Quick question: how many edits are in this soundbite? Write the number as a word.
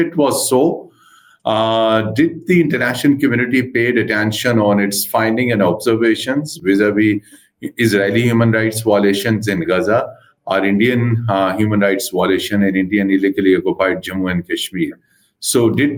zero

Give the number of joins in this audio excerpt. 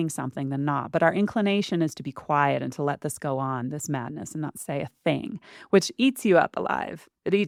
zero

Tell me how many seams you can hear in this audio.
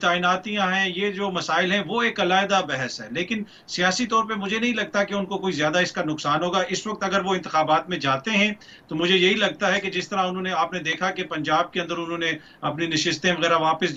zero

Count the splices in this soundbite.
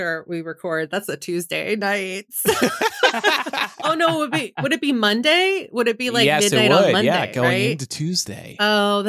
zero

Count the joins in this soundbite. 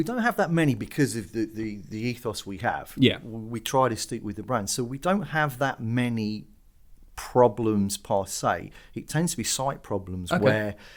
zero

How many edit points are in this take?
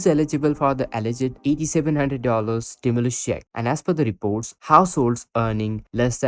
zero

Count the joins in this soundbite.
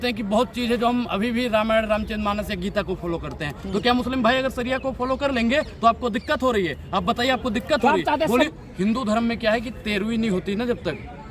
one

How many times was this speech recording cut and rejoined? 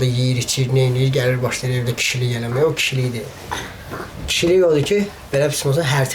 zero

